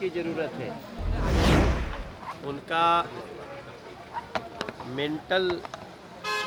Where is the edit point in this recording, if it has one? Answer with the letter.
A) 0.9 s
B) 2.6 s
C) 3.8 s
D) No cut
D